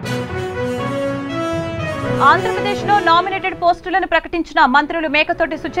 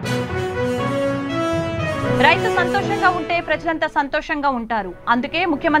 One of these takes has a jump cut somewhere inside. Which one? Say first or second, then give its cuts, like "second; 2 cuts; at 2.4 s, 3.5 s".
first; 1 cut; at 1.6 s